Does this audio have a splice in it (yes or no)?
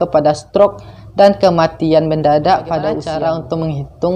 yes